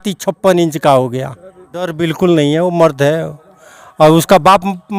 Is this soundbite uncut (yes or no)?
no